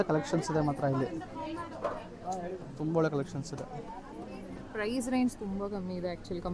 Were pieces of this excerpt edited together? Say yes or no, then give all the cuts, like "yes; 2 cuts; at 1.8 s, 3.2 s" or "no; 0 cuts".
no; 0 cuts